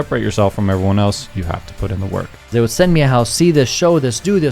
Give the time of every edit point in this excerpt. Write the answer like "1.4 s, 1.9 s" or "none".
2.5 s